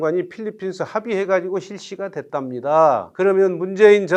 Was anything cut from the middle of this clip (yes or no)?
no